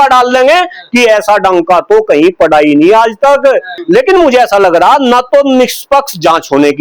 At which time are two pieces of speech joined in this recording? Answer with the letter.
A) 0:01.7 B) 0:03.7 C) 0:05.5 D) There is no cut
B